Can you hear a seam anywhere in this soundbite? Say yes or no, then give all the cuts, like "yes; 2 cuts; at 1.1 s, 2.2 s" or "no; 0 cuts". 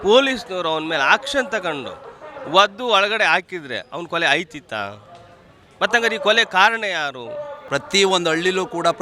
yes; 1 cut; at 7.6 s